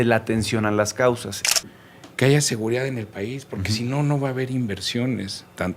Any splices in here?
yes; 1 cut; at 1.4 s

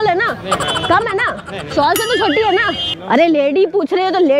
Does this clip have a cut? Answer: yes; 1 cut; at 2.8 s

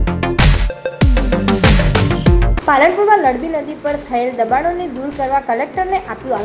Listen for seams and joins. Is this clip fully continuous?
no; 1 cut; at 2.5 s

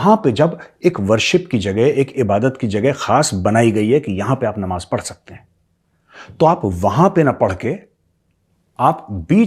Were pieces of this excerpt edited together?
no; 0 cuts

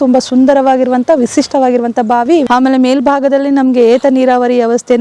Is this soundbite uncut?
no; 1 cut; at 2.4 s

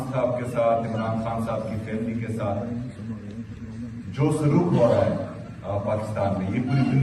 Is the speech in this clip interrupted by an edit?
no; 0 cuts

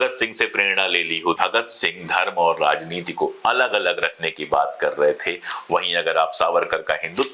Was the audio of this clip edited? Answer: yes; 1 cut; at 1.4 s

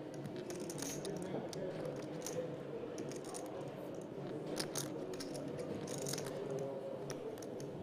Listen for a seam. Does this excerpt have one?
no; 0 cuts

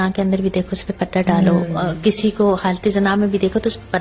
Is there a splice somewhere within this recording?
no; 0 cuts

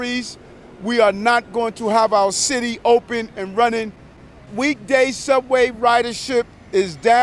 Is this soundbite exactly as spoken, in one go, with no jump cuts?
no; 1 cut; at 4.3 s

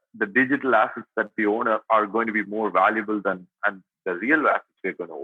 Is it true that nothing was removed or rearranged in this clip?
yes; 0 cuts

